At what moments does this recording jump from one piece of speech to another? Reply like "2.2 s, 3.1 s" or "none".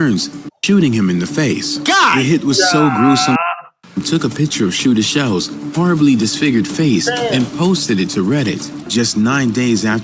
3.7 s, 8.7 s